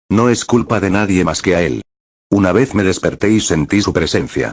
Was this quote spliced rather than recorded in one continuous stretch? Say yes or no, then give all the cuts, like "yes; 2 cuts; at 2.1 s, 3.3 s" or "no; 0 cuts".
no; 0 cuts